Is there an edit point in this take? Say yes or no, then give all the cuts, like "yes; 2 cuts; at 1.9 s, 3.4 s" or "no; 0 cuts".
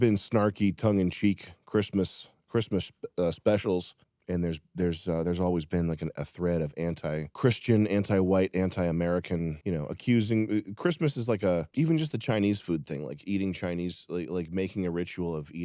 no; 0 cuts